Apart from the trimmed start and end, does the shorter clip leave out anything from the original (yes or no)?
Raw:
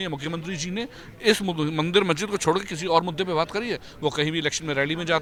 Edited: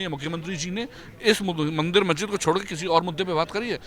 no